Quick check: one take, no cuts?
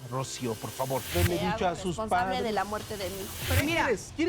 no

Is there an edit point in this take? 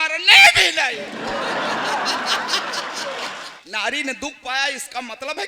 yes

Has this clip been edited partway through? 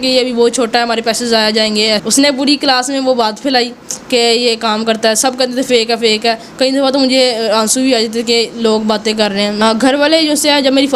yes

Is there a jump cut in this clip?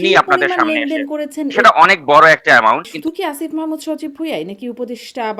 yes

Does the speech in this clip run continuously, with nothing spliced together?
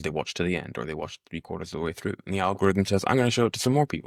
yes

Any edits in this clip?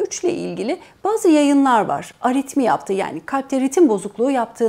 no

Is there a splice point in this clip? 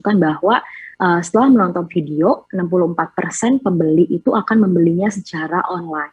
no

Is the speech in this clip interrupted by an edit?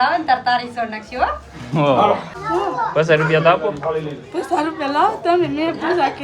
yes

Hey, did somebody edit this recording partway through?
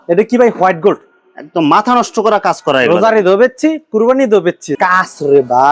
yes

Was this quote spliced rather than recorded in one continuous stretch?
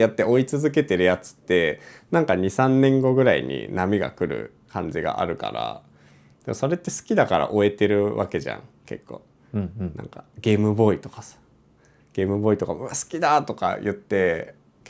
no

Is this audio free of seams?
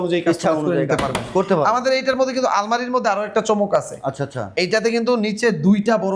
yes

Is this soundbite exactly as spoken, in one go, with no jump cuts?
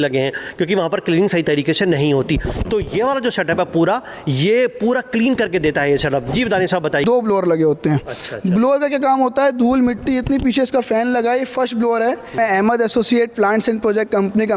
no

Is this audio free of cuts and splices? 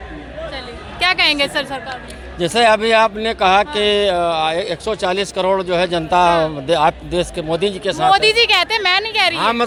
yes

